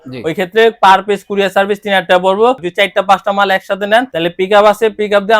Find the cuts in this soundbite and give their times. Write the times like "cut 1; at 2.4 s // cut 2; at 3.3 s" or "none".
cut 1; at 2.6 s